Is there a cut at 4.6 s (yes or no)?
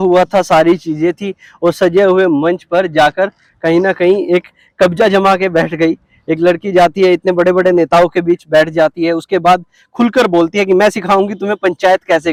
no